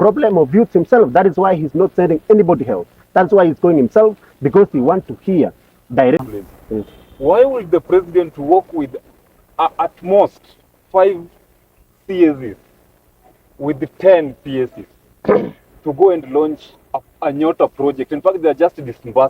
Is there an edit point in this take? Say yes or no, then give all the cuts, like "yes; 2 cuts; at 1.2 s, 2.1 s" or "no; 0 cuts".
yes; 1 cut; at 6.2 s